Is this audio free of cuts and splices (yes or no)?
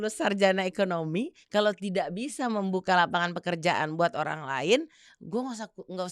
yes